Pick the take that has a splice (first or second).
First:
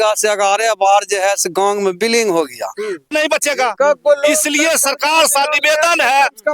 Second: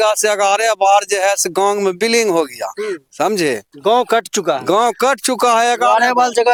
first